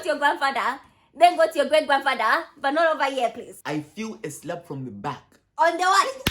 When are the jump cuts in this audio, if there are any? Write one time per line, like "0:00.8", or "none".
0:03.5